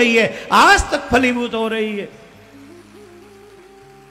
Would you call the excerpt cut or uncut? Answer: uncut